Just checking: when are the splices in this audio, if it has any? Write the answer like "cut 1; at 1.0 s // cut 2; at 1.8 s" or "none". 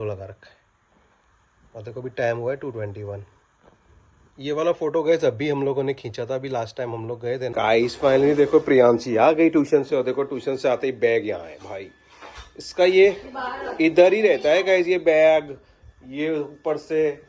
cut 1; at 7.5 s